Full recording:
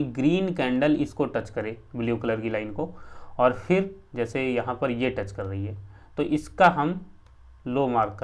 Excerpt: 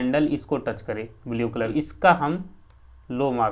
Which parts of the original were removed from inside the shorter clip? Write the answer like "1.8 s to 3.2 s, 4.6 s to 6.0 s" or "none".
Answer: 2.4 s to 6.3 s

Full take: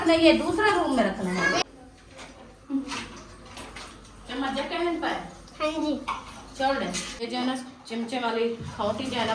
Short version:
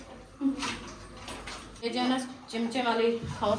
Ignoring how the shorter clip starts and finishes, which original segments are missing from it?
4.0 s to 7.1 s

